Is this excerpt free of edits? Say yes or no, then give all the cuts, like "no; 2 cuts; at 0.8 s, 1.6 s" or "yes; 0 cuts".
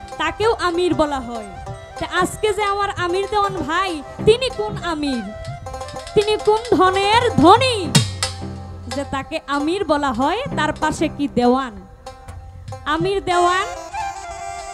yes; 0 cuts